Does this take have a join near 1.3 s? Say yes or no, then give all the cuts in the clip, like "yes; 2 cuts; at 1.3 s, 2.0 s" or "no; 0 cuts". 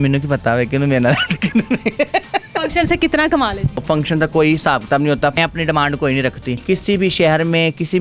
no; 4 cuts; at 2.6 s, 3.8 s, 5.4 s, 6.5 s